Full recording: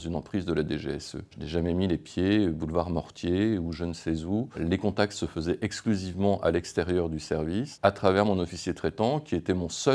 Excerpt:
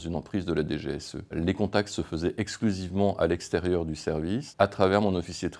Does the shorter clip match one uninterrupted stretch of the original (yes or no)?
no